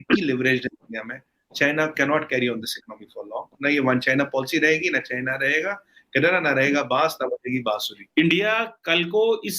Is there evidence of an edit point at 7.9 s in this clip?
yes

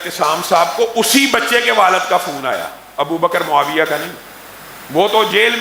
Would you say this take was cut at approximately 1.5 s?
no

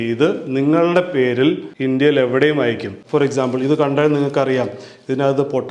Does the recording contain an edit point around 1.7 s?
yes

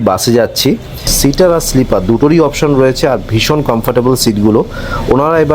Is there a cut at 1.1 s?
yes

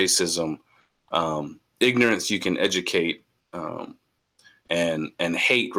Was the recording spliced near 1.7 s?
no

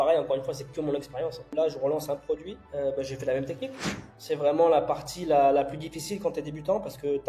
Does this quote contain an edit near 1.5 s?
yes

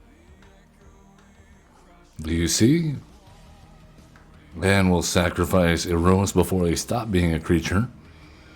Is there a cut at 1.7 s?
yes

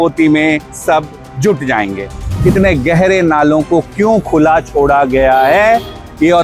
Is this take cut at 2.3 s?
yes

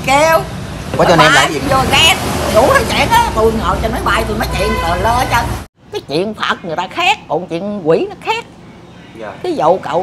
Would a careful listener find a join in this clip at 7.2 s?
no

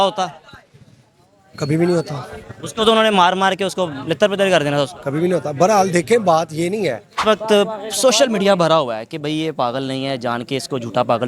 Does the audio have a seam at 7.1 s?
yes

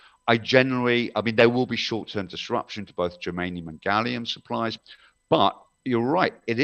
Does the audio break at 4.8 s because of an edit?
yes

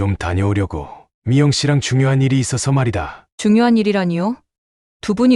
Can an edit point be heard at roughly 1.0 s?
no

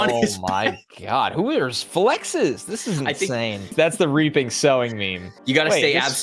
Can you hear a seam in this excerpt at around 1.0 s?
no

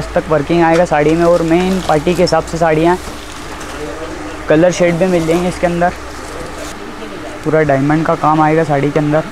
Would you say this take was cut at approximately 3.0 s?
no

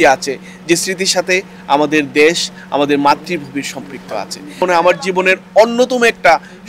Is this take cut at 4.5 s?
no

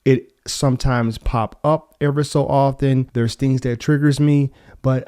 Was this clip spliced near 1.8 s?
no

